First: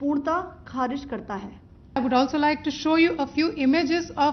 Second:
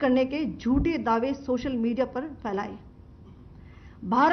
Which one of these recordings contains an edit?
first; 1 cut; at 2.0 s

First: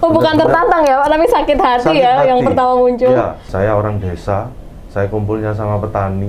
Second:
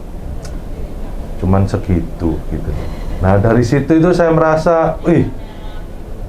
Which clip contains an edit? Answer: first; 1 cut; at 3.4 s

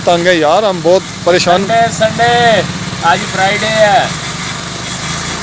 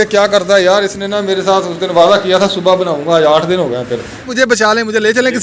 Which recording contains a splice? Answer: second; 1 cut; at 4.5 s

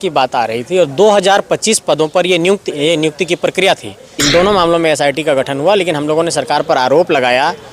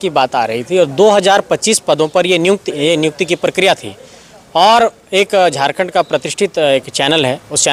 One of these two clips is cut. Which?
first; 1 cut; at 4.2 s

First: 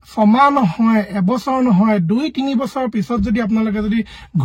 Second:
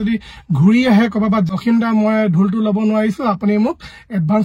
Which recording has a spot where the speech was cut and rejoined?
second; 1 cut; at 1.5 s

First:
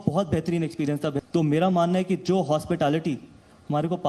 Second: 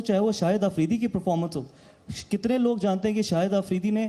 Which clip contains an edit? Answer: first; 1 cut; at 1.2 s

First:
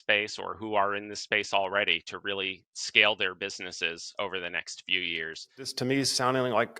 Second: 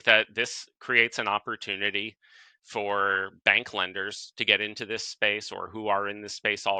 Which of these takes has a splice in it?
first; 1 cut; at 5.6 s

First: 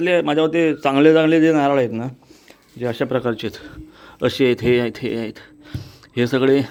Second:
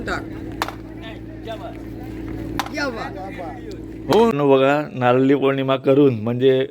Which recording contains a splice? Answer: second; 1 cut; at 4.3 s

